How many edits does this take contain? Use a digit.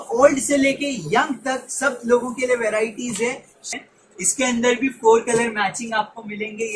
1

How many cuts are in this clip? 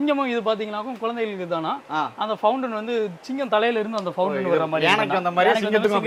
0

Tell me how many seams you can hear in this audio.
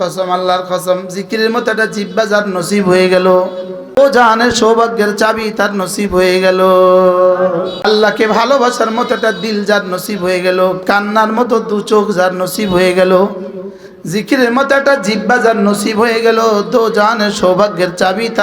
2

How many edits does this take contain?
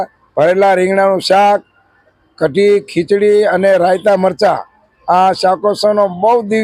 0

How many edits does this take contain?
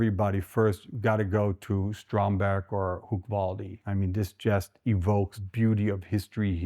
2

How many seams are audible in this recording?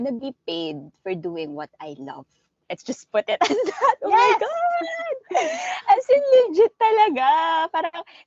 0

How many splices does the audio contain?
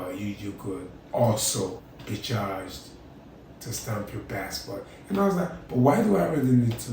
2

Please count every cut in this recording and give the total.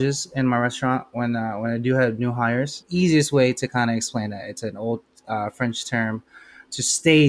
1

